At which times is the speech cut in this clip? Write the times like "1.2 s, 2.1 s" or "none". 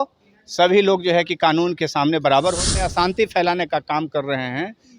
2.7 s